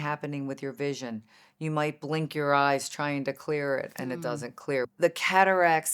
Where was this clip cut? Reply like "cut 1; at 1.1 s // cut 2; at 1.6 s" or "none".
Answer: cut 1; at 4.9 s